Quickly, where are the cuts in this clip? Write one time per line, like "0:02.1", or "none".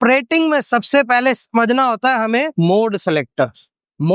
none